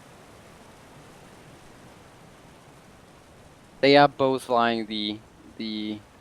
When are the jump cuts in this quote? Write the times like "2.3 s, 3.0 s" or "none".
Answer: 1.0 s